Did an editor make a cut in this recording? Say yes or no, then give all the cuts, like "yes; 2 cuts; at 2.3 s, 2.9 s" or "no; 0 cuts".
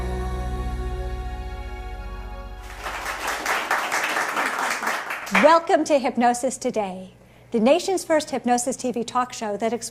yes; 1 cut; at 2.6 s